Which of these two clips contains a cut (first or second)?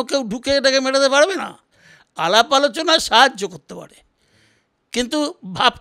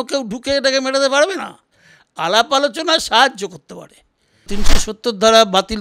second